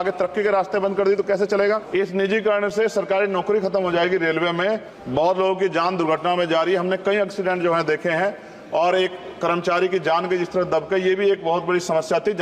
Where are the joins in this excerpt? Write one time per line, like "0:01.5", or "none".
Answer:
0:01.8
0:04.9